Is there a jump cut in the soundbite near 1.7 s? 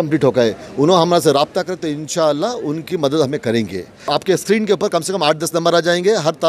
no; 1 cut; at 4.1 s

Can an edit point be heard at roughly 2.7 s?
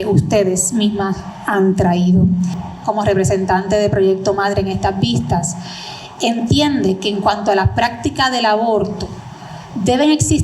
yes; 1 cut; at 2.7 s

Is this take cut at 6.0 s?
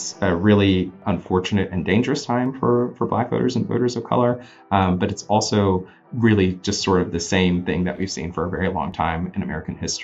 yes; 2 cuts; at 1.0 s, 6.0 s

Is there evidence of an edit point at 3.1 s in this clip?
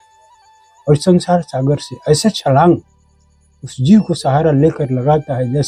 no; 0 cuts

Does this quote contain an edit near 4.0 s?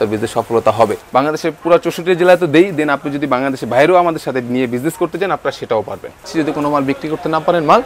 no; 2 cuts; at 1.0 s, 6.3 s

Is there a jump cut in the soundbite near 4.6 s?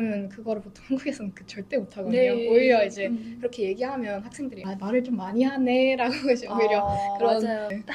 yes; 1 cut; at 4.6 s

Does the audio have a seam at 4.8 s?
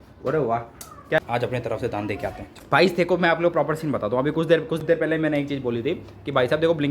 yes; 3 cuts; at 1.2 s, 2.5 s, 4.8 s

